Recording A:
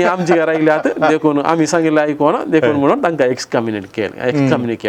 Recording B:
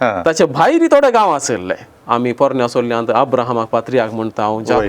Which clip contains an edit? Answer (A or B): B